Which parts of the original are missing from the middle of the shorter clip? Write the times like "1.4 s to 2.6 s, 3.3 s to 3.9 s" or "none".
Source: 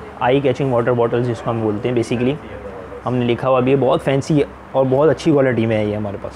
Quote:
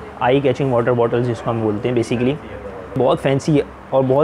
3.0 s to 3.8 s